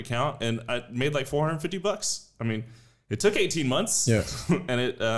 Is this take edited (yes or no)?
no